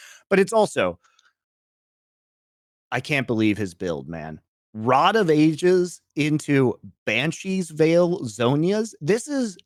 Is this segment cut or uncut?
uncut